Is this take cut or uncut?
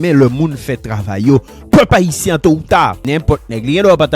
cut